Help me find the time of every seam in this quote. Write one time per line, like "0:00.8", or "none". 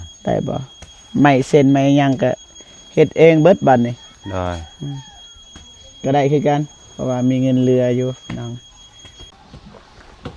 0:09.3